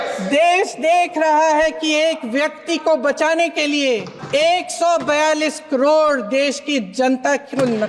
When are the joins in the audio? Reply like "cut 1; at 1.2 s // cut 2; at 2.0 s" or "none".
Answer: cut 1; at 4.1 s